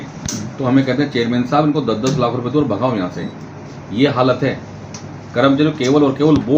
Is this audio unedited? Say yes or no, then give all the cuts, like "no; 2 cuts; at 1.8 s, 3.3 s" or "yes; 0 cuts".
yes; 0 cuts